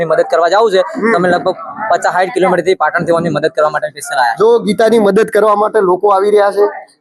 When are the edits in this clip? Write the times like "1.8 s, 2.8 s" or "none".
none

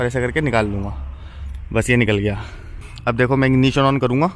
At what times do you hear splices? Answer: 2.9 s

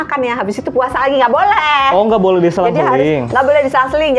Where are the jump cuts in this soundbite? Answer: none

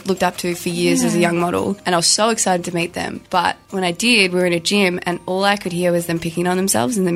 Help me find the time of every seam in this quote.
1.8 s, 3.2 s

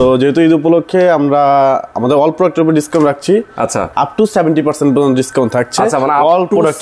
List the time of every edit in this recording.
none

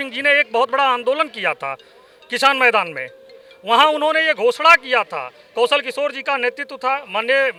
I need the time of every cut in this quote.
none

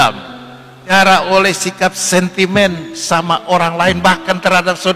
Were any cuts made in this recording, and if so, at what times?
0.9 s

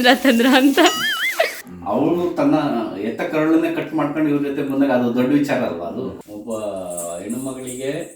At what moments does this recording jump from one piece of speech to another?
1.6 s, 6.2 s

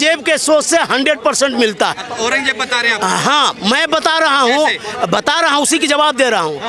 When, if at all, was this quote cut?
none

